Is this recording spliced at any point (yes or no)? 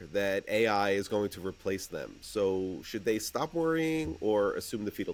no